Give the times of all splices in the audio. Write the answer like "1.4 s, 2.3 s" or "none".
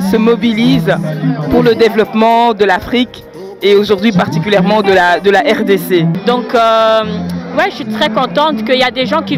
6.2 s